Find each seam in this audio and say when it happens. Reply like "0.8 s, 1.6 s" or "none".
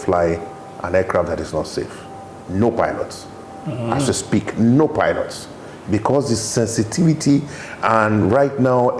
none